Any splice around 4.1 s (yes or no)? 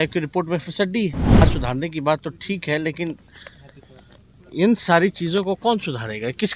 no